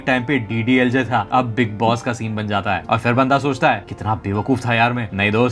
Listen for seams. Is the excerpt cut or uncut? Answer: uncut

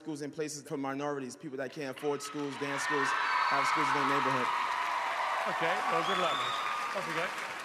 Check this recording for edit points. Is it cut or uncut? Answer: cut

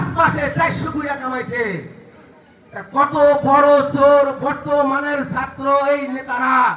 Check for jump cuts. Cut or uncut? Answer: uncut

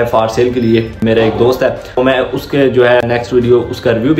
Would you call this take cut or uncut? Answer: cut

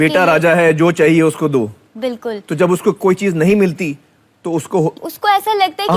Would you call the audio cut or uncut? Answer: uncut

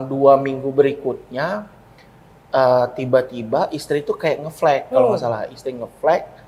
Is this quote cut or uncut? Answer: uncut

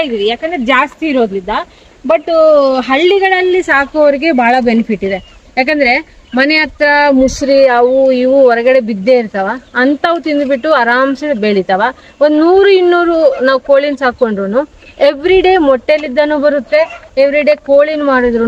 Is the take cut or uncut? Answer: uncut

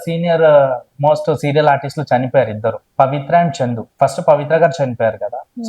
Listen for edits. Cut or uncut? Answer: cut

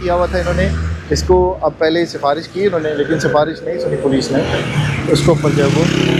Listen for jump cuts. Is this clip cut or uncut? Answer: uncut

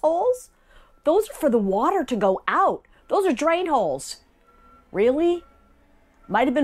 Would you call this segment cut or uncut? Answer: uncut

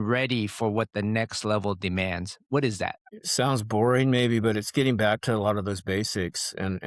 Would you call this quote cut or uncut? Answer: cut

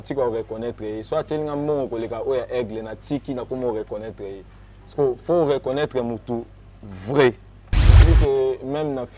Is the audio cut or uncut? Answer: cut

